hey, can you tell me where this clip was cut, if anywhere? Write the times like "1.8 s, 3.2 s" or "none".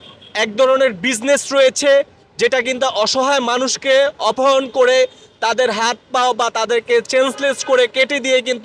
none